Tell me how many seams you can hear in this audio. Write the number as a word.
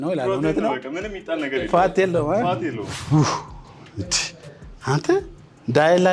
one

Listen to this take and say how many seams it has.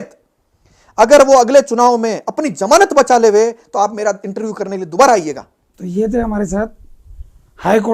zero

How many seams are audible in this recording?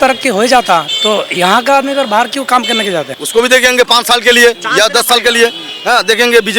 one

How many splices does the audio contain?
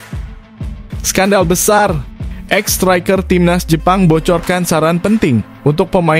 one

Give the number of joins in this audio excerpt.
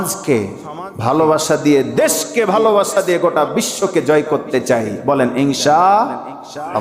zero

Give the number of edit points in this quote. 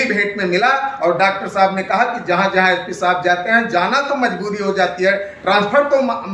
zero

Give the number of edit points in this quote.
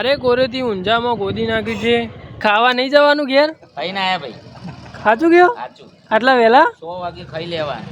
one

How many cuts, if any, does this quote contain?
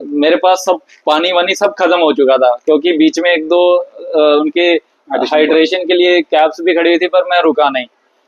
zero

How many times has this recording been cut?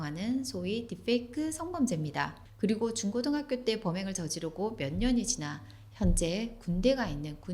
one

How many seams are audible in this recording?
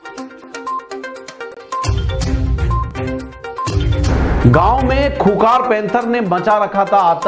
zero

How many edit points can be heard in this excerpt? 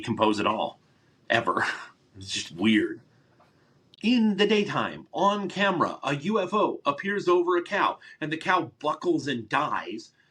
one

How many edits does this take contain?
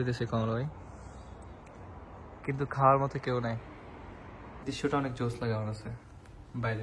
one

